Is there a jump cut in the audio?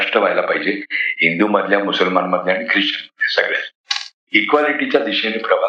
no; 0 cuts

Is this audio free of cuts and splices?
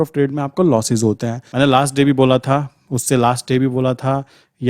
no; 1 cut; at 1.4 s

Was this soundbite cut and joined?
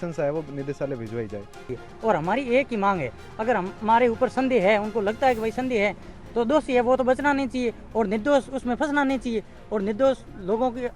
yes; 1 cut; at 1.8 s

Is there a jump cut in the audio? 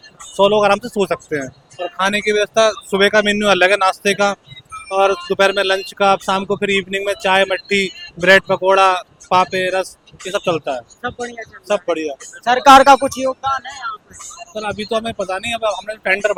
no; 0 cuts

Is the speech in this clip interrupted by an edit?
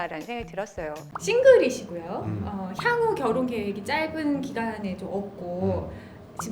yes; 1 cut; at 1.1 s

